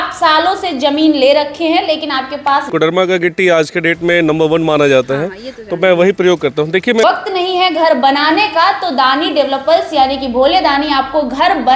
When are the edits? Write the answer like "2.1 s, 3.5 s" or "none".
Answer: 2.6 s, 7.0 s